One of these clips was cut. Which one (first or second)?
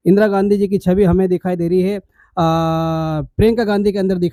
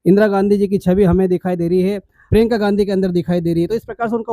second